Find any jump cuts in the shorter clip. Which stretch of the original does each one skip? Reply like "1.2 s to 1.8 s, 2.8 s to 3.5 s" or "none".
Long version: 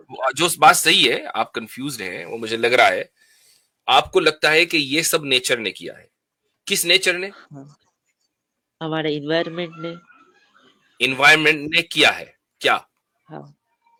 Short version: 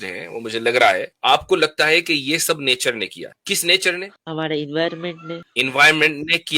3.1 s to 3.7 s, 5.9 s to 6.5 s, 7.4 s to 8.7 s, 9.9 s to 10.8 s